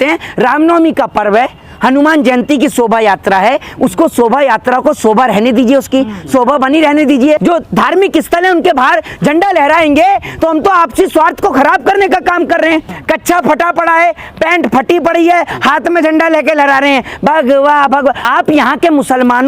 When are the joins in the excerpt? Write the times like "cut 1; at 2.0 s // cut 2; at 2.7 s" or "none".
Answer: cut 1; at 7.4 s // cut 2; at 12.9 s // cut 3; at 18.2 s